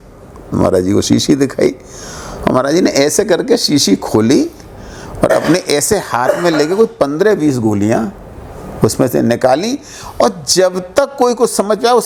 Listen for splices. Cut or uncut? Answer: uncut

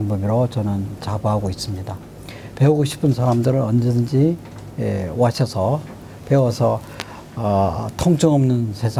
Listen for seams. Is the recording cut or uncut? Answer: uncut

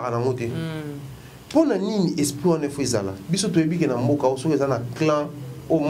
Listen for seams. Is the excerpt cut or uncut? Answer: uncut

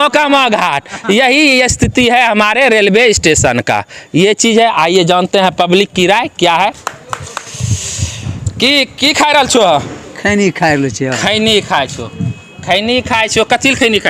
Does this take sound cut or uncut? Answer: uncut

